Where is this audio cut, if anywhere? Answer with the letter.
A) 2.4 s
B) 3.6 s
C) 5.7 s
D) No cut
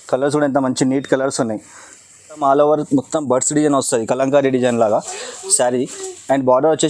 A